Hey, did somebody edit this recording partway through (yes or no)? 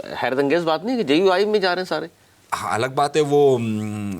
no